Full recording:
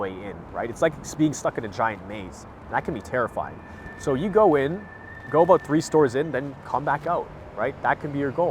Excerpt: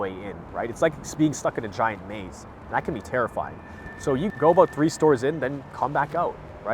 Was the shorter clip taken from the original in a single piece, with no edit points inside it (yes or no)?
no